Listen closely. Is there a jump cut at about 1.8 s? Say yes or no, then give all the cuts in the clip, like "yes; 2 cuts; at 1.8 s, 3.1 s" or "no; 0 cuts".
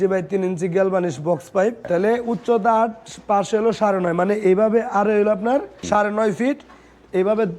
yes; 2 cuts; at 1.8 s, 5.7 s